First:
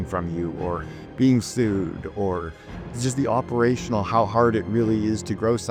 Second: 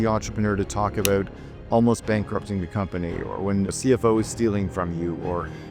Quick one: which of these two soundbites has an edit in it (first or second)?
second